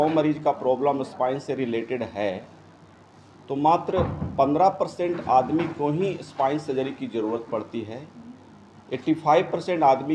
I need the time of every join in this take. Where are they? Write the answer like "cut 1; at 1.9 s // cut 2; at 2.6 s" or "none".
none